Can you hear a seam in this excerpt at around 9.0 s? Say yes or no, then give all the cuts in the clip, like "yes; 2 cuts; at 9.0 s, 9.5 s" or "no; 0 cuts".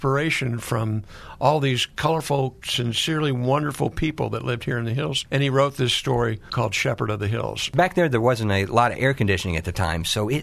no; 4 cuts; at 2.7 s, 5.2 s, 6.5 s, 7.7 s